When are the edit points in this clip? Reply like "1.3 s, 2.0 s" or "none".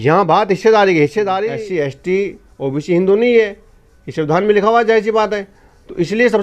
1.5 s